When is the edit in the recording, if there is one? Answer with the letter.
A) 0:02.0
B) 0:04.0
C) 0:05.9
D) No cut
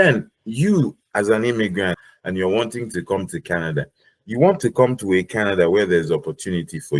A